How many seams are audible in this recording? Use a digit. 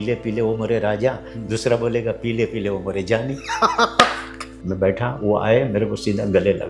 2